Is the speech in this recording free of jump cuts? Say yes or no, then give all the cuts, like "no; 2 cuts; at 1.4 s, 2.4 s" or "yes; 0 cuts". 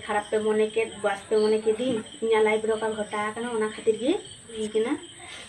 no; 1 cut; at 4.6 s